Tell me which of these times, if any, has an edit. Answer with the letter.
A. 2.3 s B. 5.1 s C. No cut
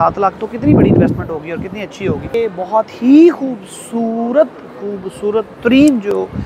A